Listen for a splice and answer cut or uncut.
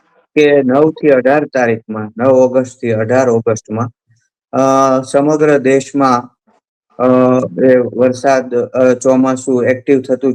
uncut